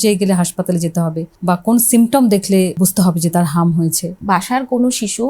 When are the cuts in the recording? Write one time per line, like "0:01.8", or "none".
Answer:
0:01.3
0:02.8
0:04.2